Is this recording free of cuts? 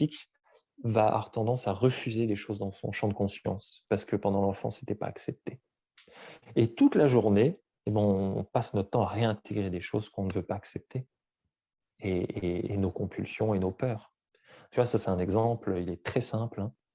yes; 0 cuts

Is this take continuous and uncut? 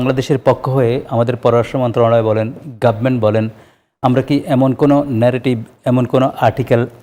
yes; 0 cuts

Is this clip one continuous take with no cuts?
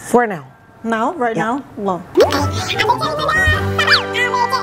no; 1 cut; at 2.0 s

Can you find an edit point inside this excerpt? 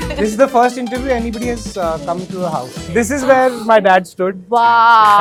no; 0 cuts

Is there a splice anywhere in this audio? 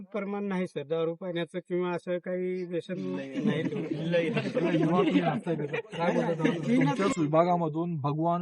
yes; 1 cut; at 7.0 s

